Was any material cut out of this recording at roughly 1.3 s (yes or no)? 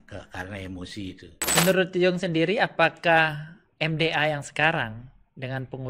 yes